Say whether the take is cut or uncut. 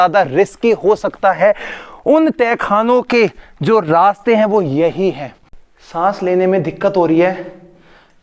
cut